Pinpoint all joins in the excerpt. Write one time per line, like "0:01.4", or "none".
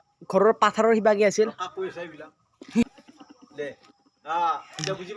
0:02.8

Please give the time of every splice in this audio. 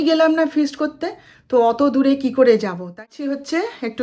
0:03.0

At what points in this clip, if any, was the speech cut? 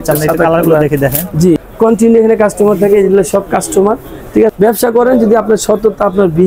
0:01.6
0:04.5

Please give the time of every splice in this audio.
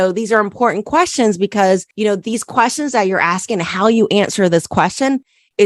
none

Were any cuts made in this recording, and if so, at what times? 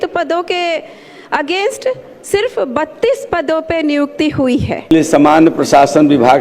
0:04.9

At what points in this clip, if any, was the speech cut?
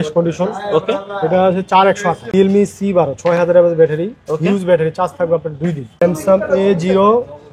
0:02.3
0:05.9

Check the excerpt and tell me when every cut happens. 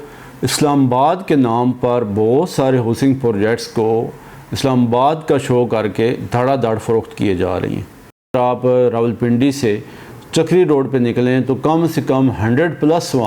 0:08.3

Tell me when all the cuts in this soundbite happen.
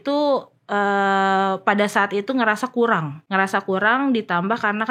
0:03.2

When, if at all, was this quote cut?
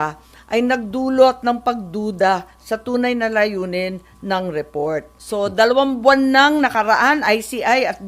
0:05.2

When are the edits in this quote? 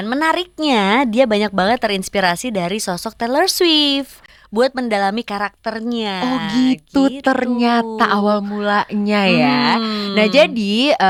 none

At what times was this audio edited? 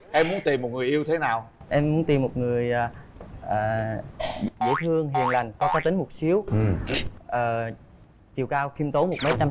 none

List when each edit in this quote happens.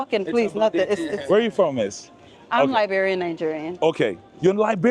none

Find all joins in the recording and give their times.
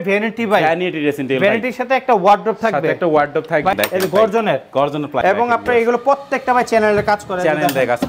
0:03.7
0:05.1

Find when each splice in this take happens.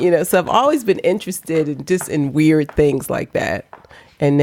none

